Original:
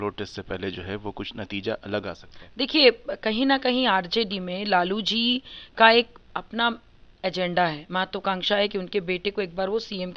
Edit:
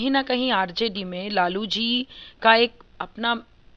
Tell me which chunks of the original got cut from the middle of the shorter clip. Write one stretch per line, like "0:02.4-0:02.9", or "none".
none